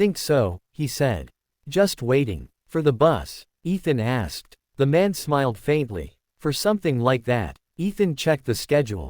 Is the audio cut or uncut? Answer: cut